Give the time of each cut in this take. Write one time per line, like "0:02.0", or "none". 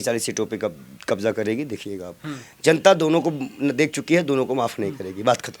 none